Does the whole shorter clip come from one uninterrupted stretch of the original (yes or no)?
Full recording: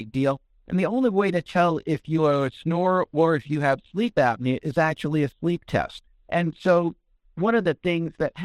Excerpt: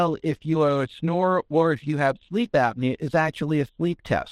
yes